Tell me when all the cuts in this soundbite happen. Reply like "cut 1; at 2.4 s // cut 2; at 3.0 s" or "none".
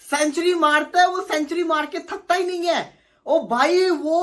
none